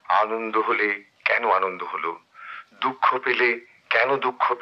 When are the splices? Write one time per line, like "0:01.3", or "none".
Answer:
none